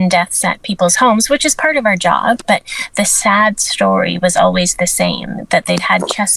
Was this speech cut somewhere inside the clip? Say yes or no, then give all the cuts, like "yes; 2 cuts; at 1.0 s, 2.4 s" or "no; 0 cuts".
yes; 1 cut; at 2.4 s